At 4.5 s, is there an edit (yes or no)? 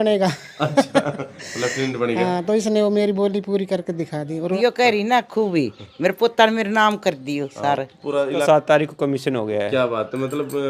yes